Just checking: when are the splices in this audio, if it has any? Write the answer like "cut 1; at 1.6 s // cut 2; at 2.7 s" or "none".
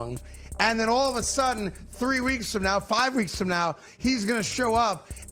none